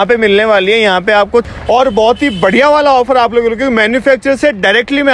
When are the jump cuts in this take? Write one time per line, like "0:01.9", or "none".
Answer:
0:01.5